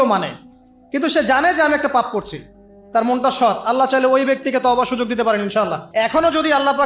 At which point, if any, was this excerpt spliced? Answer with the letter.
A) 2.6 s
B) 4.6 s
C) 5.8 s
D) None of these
C